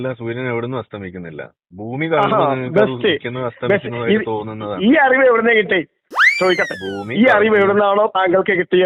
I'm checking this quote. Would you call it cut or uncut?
uncut